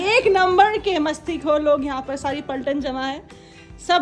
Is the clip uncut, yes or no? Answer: yes